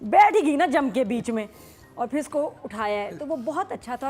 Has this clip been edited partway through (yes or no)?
no